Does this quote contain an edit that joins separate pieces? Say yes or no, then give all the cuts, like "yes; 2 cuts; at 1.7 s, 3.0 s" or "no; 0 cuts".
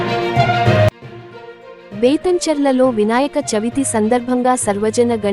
yes; 1 cut; at 1.0 s